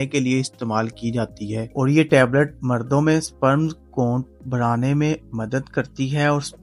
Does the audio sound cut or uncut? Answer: uncut